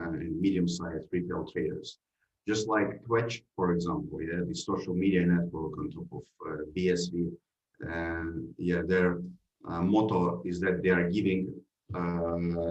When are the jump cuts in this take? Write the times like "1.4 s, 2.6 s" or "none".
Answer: none